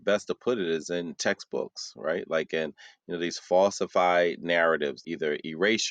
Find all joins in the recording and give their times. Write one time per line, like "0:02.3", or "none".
0:05.0